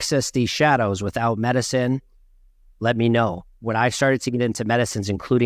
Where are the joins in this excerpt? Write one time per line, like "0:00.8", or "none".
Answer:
0:03.5